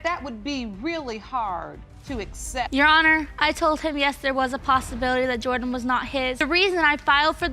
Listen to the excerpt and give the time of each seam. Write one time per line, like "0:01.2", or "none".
0:02.7